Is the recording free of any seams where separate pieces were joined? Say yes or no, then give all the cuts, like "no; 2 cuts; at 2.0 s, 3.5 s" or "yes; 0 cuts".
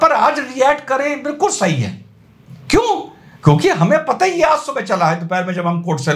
yes; 0 cuts